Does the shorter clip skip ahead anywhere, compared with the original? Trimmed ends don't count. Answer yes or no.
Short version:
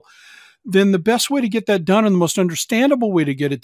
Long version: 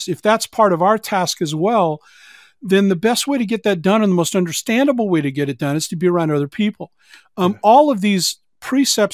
no